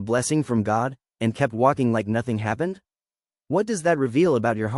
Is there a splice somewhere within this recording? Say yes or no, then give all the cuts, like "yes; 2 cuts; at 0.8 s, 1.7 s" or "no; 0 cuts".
no; 0 cuts